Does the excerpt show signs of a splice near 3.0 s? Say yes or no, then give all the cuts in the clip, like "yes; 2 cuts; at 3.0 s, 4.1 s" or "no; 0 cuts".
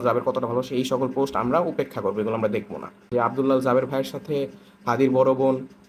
yes; 1 cut; at 3.0 s